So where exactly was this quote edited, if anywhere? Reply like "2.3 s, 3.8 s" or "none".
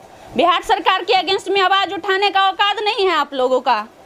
none